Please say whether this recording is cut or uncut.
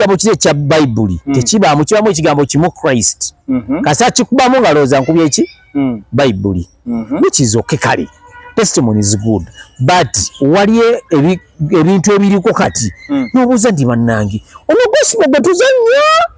uncut